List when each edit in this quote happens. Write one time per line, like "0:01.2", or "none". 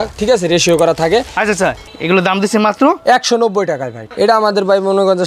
0:01.8
0:04.0